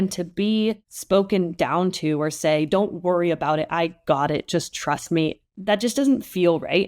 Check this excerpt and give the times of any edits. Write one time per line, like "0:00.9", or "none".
0:00.9